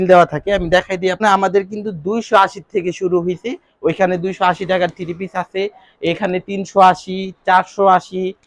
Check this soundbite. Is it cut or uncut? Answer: cut